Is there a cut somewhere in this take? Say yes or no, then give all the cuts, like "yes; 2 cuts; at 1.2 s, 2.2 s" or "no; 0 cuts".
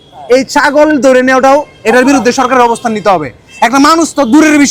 no; 0 cuts